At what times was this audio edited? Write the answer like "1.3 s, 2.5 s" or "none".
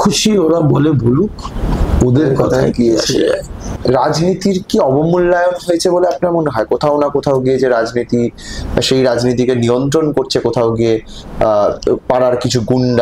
3.7 s